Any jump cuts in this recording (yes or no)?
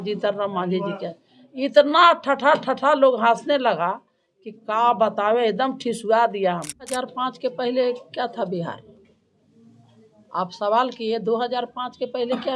yes